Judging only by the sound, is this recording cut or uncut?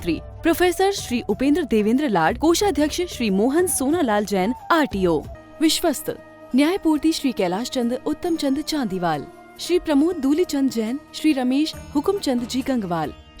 cut